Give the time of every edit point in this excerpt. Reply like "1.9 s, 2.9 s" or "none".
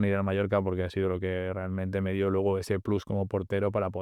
none

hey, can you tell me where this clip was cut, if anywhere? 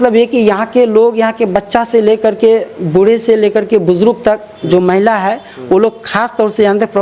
none

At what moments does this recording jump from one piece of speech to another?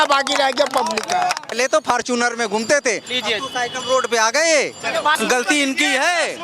1.5 s, 5.1 s

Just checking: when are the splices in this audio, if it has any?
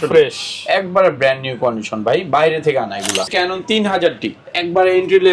3.2 s

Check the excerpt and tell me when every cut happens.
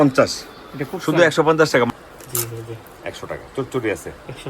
1.9 s

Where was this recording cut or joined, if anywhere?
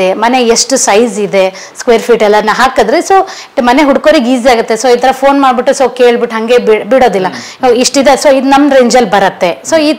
none

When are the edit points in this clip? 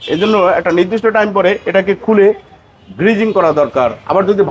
none

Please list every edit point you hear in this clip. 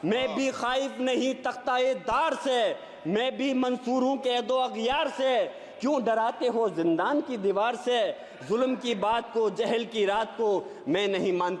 none

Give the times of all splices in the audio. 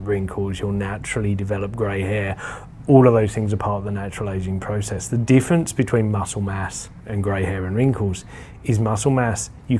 none

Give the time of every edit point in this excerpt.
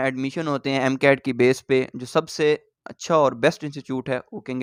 none

